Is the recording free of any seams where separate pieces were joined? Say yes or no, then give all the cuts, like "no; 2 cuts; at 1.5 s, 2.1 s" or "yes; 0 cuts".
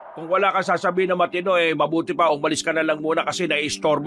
yes; 0 cuts